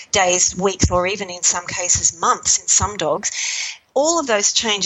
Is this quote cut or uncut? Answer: uncut